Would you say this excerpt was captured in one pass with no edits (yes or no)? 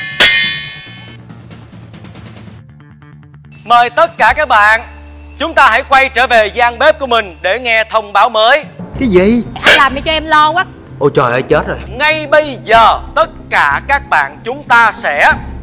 no